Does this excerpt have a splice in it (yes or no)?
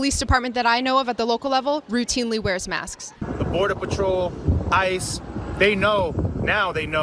yes